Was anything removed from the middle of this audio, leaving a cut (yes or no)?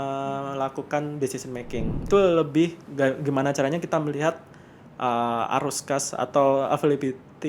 yes